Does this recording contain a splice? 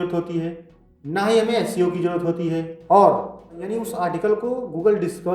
yes; 1 cut; at 3.7 s

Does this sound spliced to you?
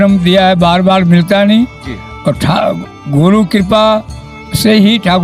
no; 0 cuts

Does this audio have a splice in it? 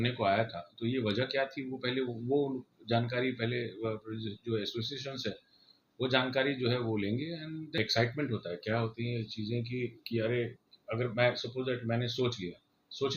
yes; 1 cut; at 7.8 s

